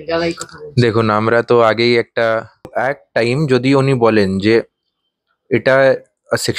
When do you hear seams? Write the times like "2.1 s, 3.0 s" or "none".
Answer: 2.5 s